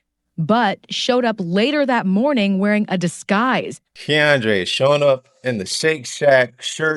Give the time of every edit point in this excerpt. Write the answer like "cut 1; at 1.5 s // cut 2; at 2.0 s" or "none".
cut 1; at 3.8 s

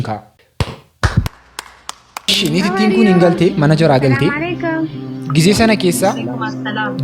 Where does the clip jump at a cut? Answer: cut 1; at 2.3 s

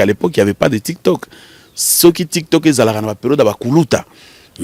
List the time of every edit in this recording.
none

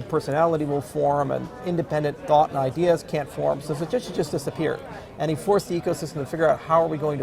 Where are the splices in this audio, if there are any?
none

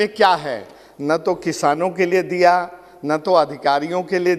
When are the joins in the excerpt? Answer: none

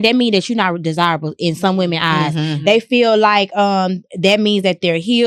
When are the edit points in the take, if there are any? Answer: none

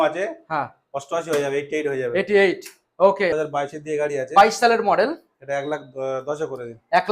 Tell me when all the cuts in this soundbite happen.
cut 1; at 3.3 s

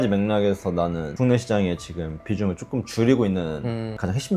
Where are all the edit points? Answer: none

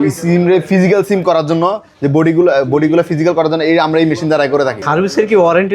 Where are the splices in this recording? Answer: cut 1; at 4.8 s

